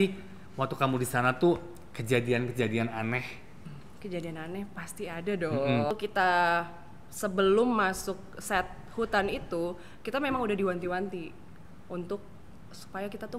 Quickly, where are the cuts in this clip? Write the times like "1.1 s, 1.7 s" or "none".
3.8 s, 5.9 s